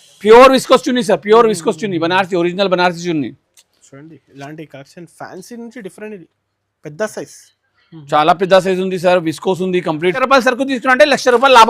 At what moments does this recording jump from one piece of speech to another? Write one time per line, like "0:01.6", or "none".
0:10.2

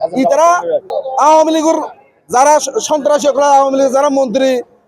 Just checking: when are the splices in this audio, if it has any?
0:01.0

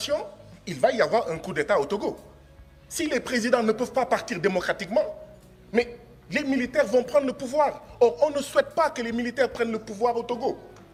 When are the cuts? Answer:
none

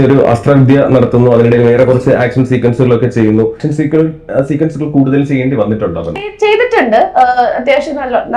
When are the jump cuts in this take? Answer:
0:03.6
0:06.3

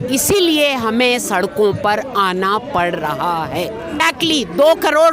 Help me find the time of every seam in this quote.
0:04.0

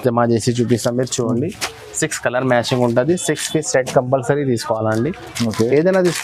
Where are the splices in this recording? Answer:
none

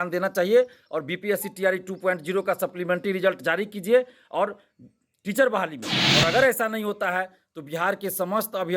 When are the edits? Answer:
0:06.0

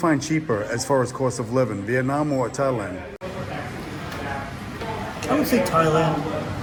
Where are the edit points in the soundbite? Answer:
none

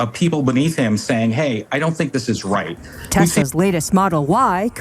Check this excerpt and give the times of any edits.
0:03.4

